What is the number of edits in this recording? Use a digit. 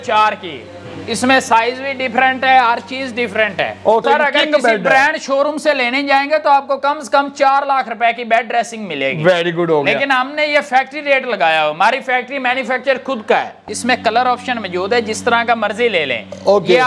2